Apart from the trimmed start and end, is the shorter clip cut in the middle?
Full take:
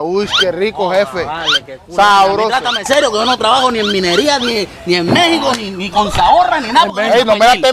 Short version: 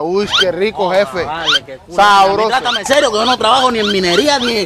no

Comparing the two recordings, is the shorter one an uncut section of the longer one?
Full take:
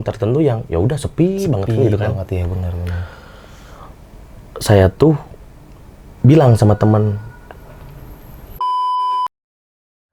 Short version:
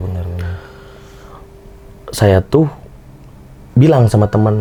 yes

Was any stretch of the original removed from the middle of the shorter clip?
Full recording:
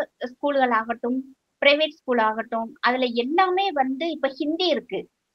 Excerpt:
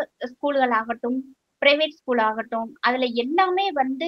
no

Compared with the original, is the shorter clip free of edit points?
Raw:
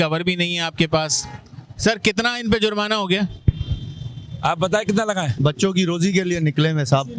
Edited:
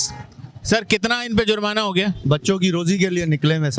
no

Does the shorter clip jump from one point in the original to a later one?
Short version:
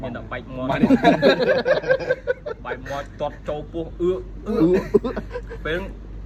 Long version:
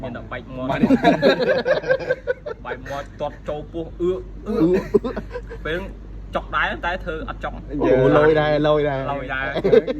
no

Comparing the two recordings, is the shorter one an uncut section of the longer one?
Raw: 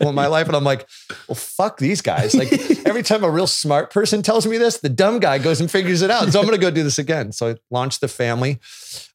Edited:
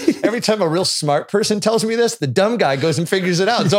yes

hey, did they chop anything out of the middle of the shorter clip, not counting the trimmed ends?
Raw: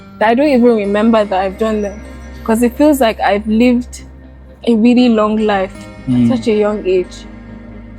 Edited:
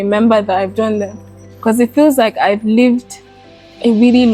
no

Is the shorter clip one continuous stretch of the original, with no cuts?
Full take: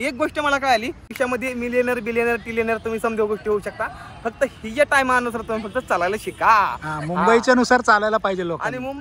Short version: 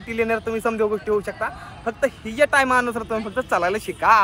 yes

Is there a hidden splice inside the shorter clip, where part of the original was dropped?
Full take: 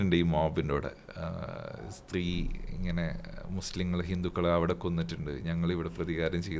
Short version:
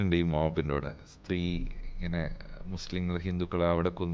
yes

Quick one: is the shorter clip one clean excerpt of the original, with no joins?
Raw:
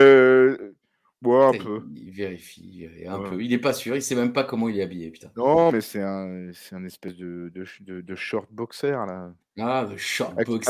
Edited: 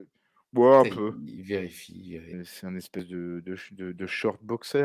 no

